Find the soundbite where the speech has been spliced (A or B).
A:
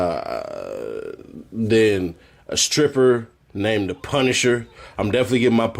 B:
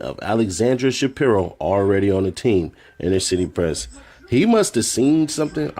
A